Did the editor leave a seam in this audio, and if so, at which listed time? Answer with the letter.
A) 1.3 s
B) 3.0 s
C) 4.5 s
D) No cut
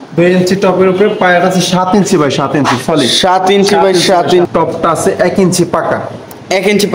C